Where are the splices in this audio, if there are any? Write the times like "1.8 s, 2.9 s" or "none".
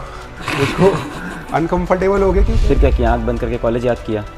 2.6 s